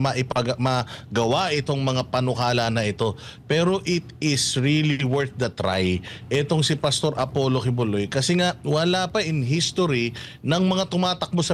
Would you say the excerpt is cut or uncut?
uncut